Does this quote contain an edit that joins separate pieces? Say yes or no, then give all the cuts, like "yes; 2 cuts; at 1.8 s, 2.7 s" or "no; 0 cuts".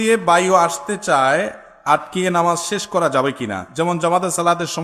no; 0 cuts